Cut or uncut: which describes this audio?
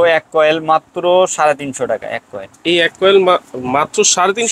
uncut